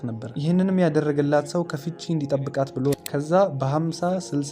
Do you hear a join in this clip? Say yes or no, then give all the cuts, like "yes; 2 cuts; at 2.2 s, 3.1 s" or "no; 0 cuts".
yes; 1 cut; at 3.0 s